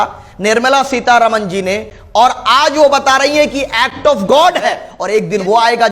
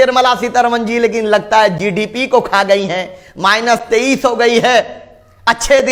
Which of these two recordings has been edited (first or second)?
first